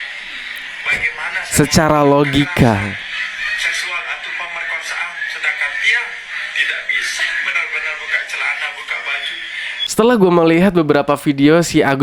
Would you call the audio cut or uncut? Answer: cut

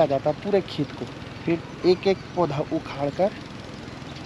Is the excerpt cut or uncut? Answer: cut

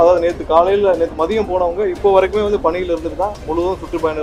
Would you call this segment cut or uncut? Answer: uncut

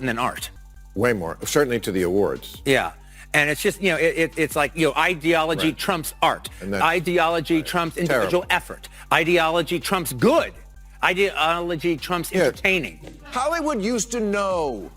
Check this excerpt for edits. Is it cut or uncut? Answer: cut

